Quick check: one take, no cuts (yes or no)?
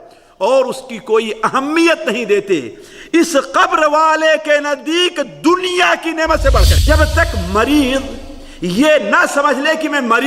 no